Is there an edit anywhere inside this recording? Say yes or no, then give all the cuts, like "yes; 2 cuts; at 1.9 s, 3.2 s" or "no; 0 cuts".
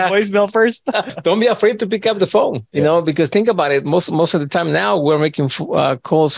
yes; 2 cuts; at 1.1 s, 2.6 s